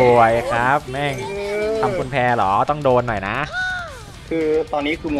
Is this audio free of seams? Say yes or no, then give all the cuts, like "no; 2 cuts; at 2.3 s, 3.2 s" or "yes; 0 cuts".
yes; 0 cuts